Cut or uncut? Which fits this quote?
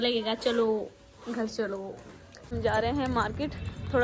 cut